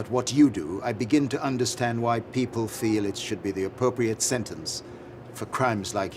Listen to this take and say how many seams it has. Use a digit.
0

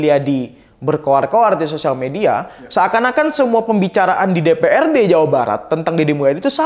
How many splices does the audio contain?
0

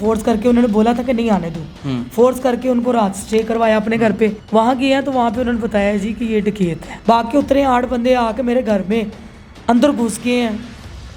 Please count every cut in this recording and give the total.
2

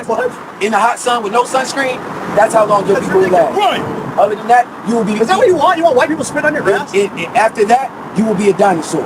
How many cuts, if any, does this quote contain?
2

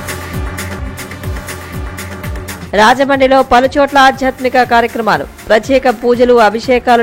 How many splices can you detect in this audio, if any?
1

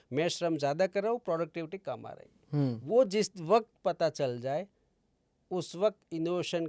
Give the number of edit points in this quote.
0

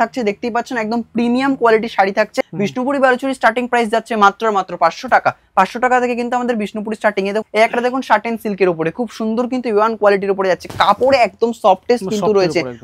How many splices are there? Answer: 2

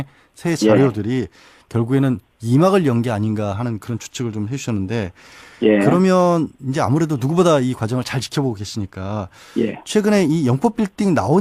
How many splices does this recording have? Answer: 0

